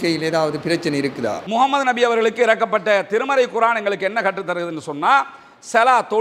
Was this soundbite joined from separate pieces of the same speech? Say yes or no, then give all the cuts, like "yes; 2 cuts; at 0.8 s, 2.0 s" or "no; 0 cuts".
yes; 1 cut; at 1.4 s